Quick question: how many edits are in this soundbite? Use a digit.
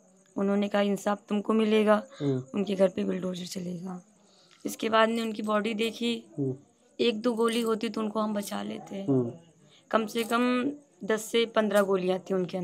1